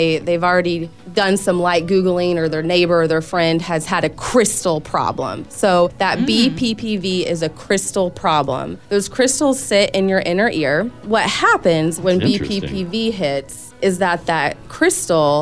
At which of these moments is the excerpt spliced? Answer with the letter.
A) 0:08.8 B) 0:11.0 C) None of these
B